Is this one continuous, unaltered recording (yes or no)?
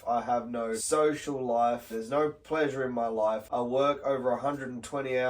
no